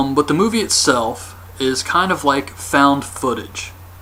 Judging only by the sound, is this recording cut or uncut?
uncut